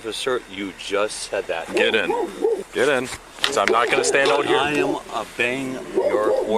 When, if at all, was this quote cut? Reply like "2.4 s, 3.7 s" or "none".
2.7 s